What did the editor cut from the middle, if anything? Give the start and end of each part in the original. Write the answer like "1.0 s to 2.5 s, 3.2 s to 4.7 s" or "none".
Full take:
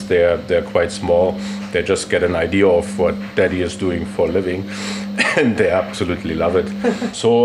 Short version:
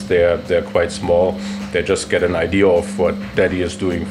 none